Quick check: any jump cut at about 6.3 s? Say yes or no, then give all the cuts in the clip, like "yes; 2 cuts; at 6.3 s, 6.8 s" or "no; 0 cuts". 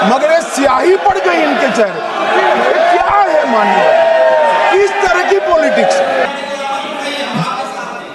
yes; 1 cut; at 6.3 s